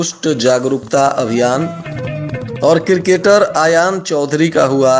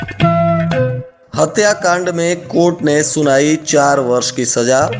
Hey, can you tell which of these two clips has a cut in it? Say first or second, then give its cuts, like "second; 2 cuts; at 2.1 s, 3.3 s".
second; 1 cut; at 1.1 s